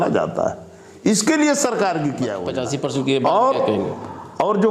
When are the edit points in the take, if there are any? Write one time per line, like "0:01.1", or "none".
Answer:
0:02.4